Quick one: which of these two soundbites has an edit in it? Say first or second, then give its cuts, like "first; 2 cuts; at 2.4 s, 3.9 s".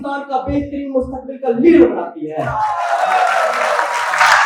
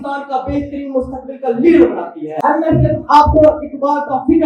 second; 1 cut; at 2.3 s